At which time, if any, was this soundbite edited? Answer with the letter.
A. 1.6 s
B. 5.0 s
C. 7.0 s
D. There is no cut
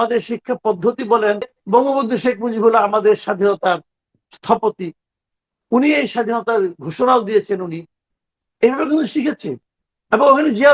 A